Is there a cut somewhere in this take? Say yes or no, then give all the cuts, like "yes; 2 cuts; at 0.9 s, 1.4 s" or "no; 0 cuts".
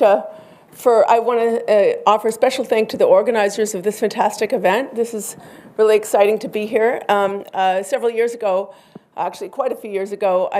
yes; 1 cut; at 4.3 s